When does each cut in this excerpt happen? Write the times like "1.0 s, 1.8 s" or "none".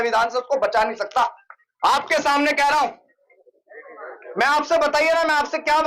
3.3 s